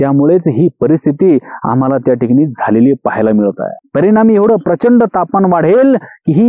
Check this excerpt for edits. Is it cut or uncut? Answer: cut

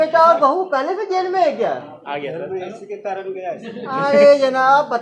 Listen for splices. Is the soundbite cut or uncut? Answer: uncut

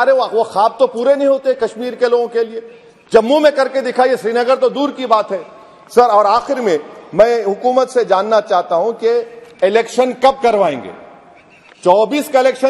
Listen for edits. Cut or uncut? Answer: uncut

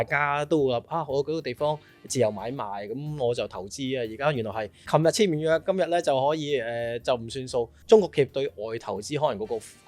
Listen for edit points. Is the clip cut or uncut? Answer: cut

